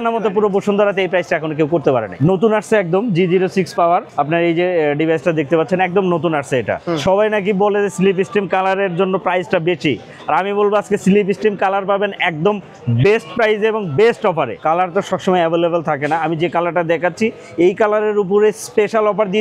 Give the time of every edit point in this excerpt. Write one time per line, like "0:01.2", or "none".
0:02.1
0:04.1
0:06.8
0:14.5